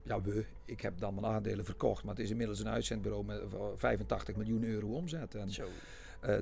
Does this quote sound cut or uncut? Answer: uncut